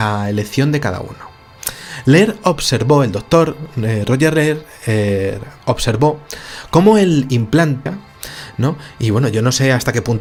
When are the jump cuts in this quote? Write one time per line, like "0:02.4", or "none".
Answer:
none